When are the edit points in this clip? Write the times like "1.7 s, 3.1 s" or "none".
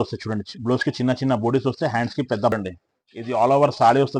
2.5 s